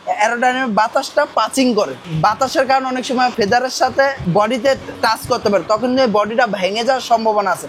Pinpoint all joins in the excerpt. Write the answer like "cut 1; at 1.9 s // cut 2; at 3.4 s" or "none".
cut 1; at 2.0 s // cut 2; at 3.3 s // cut 3; at 4.2 s